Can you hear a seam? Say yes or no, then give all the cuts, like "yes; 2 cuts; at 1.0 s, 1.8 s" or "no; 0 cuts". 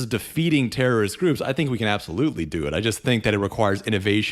no; 0 cuts